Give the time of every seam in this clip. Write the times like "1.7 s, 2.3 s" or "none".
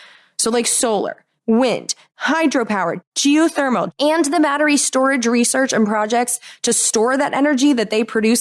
1.3 s, 2.0 s, 3.0 s, 3.9 s

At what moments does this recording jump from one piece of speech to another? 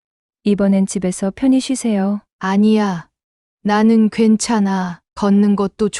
2.3 s

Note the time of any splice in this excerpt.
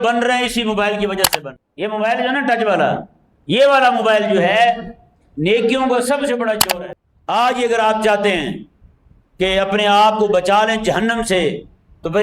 1.3 s, 6.6 s

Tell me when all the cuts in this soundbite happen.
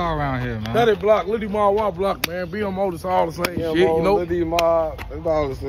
none

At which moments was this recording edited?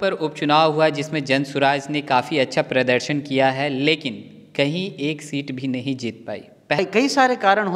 6.8 s

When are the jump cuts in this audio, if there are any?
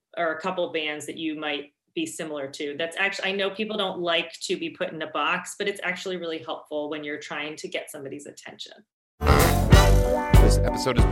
9.1 s

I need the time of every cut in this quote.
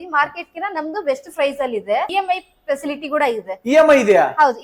2.1 s

